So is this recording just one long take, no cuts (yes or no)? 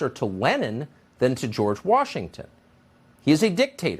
no